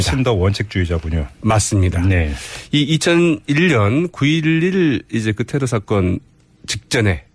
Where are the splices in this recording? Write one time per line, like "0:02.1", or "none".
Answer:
none